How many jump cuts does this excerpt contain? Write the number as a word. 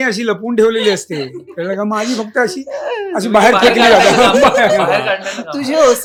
zero